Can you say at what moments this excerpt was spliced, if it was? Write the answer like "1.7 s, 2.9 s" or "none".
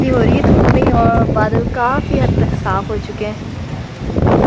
none